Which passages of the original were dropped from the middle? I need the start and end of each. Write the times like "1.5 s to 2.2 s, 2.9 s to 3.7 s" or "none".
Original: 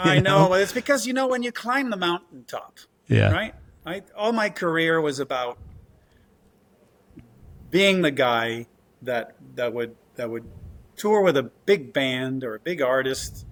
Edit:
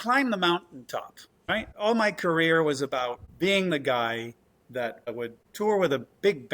2.9 s to 3.7 s, 5.6 s to 7.6 s, 9.4 s to 10.5 s